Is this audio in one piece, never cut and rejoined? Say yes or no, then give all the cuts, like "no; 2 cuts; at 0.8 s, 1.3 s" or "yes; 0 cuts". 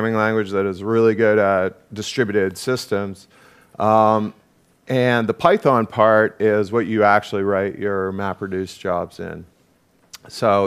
no; 1 cut; at 8.8 s